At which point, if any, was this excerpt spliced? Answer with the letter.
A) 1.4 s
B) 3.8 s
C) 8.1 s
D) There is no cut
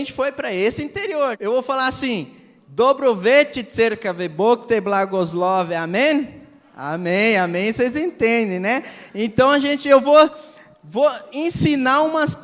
A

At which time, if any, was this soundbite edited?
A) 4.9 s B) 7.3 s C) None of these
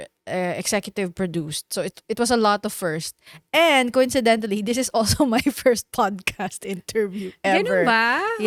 C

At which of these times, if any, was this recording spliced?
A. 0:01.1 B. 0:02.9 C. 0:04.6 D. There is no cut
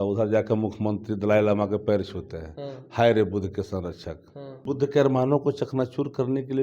C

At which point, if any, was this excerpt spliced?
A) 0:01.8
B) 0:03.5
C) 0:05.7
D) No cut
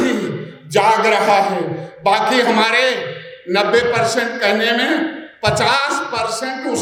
D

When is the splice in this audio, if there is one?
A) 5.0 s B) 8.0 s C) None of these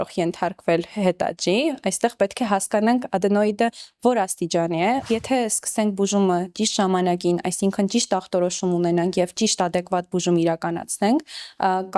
A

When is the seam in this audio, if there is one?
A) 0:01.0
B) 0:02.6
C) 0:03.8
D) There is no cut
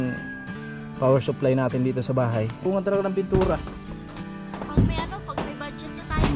B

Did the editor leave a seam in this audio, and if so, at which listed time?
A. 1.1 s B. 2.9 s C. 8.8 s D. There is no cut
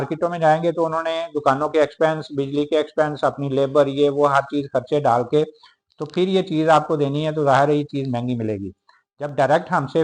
D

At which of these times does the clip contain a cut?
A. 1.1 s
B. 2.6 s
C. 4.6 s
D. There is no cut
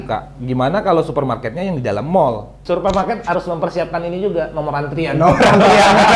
B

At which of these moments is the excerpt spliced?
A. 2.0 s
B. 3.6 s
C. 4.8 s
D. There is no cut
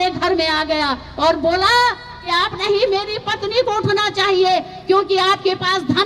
D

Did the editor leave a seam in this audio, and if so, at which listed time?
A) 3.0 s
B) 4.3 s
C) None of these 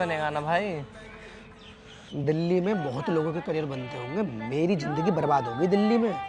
C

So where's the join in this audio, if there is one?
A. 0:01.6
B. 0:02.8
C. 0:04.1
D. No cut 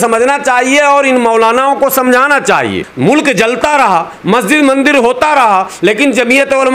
B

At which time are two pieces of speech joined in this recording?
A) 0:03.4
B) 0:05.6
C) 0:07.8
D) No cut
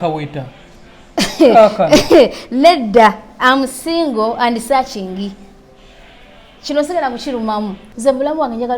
C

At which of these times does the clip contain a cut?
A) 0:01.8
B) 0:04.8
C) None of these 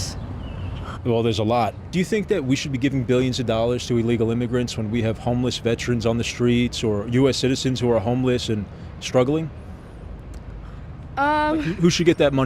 A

